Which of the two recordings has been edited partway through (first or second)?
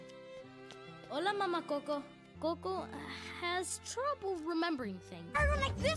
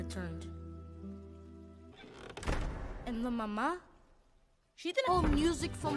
first